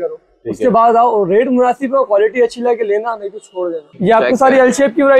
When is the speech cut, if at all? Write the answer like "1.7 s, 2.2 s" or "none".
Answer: 3.9 s